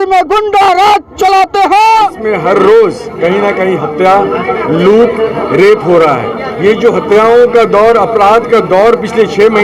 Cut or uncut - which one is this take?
cut